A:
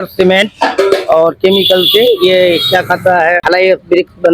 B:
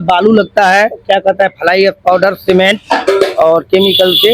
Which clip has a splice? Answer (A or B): A